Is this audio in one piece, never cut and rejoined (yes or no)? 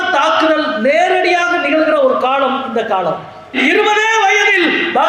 no